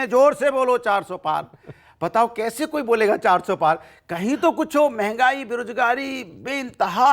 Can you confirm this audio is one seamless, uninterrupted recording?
yes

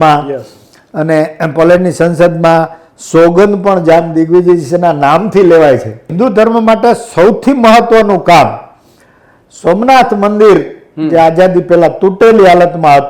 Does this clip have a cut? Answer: yes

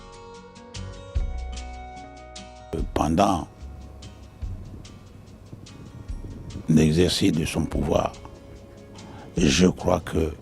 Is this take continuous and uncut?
no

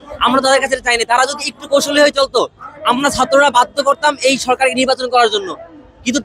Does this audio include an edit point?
no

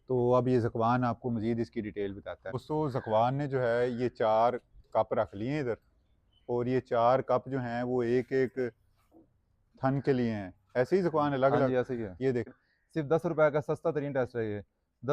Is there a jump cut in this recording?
yes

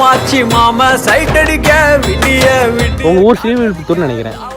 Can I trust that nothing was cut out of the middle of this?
no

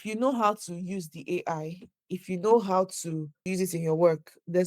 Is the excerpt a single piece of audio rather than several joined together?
no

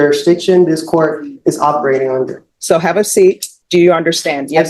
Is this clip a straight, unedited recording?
no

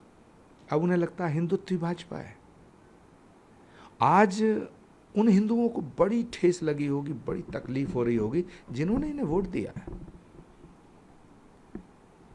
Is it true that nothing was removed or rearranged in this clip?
yes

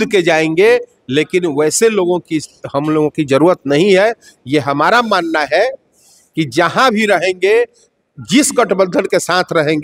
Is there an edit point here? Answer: no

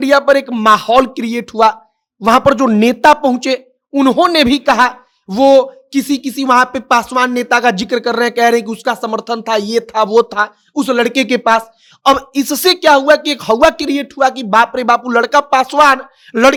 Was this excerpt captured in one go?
yes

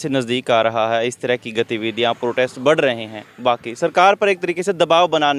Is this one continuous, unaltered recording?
yes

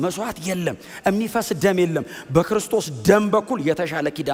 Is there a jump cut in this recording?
no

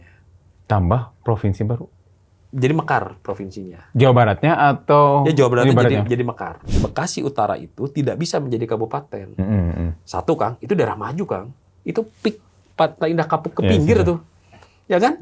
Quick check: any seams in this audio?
yes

